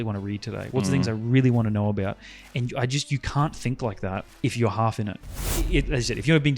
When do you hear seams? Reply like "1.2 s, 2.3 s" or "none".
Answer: 4.3 s, 5.2 s